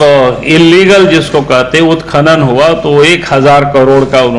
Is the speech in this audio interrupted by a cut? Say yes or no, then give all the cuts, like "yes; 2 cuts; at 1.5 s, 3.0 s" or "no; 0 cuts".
no; 0 cuts